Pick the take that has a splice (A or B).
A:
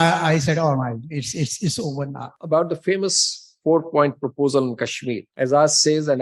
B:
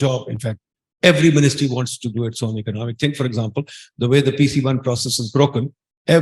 A